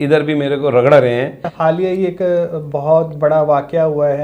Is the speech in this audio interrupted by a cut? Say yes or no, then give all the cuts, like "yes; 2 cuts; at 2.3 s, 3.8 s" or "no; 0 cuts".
yes; 1 cut; at 1.5 s